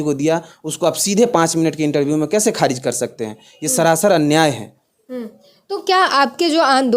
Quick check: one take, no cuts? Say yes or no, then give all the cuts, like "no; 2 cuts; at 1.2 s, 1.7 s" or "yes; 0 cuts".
yes; 0 cuts